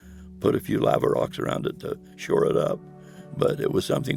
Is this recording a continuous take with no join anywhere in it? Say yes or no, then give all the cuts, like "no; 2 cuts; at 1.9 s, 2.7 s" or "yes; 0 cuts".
yes; 0 cuts